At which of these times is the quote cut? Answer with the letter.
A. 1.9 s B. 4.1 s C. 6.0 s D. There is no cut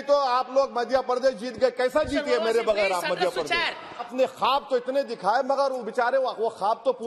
B